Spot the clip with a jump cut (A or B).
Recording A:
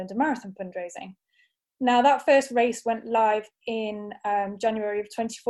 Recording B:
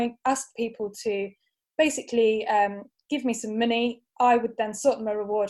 A